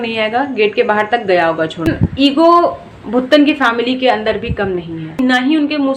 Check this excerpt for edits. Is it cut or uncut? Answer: cut